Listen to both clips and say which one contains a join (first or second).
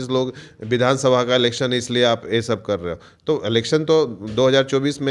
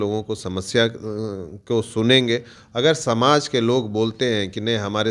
second